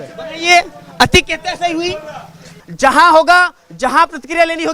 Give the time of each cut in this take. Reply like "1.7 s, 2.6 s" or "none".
2.6 s